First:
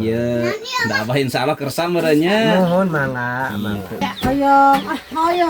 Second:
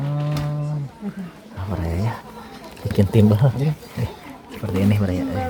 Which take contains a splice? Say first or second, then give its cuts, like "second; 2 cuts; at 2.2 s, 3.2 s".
first; 1 cut; at 4.0 s